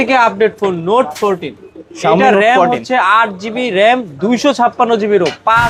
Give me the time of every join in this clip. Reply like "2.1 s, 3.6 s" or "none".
none